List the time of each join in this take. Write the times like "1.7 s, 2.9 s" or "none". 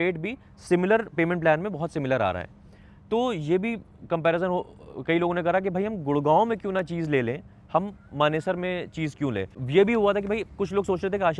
9.5 s